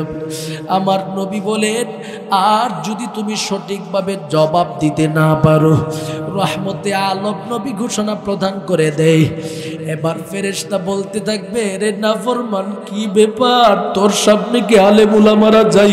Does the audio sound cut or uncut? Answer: cut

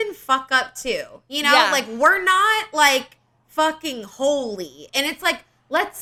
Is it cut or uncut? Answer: uncut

